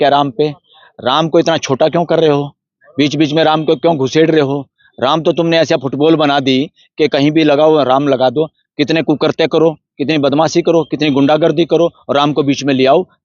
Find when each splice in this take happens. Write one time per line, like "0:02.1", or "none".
none